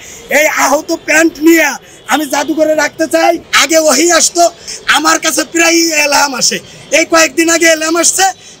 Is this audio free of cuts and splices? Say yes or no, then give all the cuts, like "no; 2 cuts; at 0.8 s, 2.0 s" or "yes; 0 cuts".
no; 2 cuts; at 3.5 s, 4.6 s